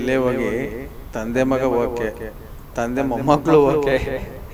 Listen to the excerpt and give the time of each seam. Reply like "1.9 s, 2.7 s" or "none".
none